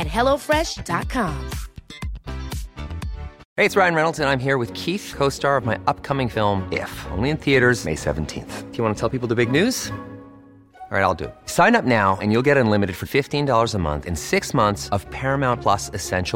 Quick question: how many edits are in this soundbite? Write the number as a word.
one